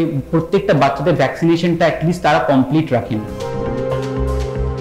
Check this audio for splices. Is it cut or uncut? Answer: uncut